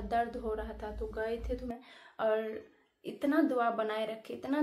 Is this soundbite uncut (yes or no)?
no